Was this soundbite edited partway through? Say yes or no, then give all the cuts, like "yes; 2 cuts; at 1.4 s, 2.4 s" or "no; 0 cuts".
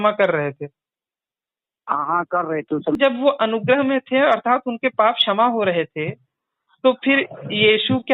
yes; 1 cut; at 3.0 s